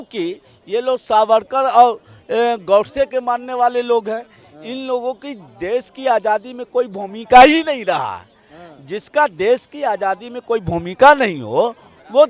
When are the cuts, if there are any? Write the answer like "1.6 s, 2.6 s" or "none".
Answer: none